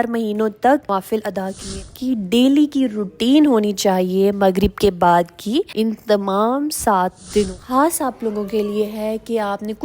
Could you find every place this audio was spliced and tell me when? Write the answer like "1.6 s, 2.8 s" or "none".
1.9 s, 7.6 s